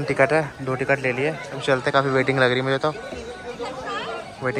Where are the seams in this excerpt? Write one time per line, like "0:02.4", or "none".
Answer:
none